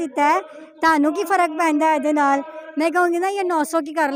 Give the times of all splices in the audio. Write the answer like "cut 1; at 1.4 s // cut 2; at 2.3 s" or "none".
none